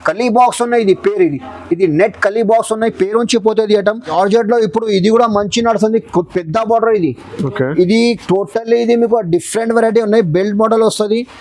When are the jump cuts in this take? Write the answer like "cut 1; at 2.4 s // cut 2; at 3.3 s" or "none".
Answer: cut 1; at 4.1 s